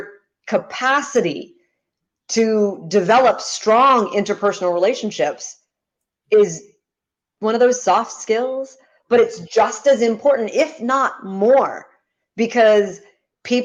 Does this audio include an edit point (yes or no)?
no